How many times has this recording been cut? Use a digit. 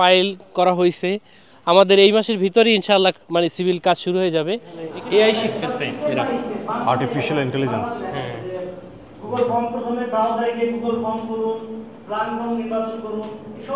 1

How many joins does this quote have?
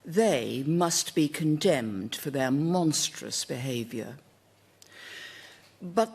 1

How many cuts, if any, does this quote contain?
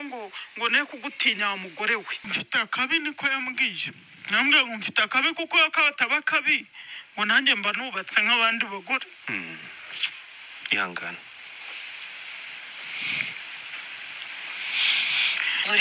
2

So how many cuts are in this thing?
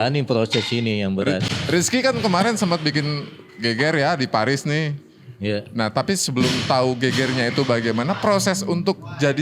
0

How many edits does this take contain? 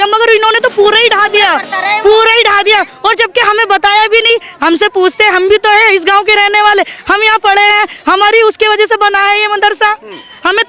0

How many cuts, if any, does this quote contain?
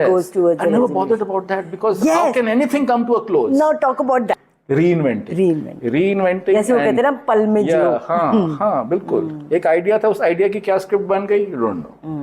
1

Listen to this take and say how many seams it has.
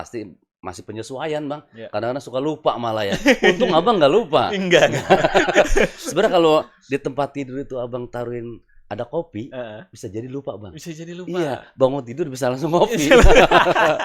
0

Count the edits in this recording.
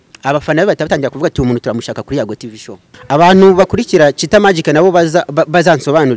1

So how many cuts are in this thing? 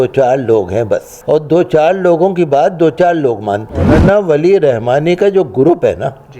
2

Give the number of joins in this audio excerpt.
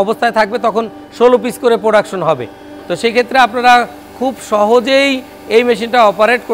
0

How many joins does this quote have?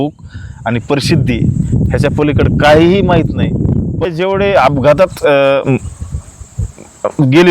1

